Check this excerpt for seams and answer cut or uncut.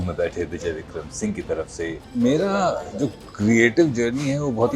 cut